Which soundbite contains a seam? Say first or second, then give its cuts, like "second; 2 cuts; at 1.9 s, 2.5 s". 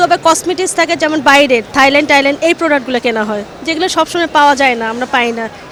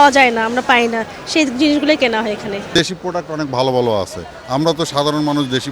second; 1 cut; at 2.8 s